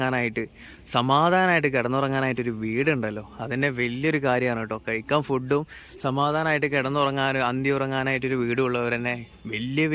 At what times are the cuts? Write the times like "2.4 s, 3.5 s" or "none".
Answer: none